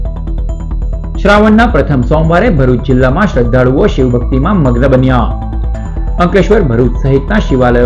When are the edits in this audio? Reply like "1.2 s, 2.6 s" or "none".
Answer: none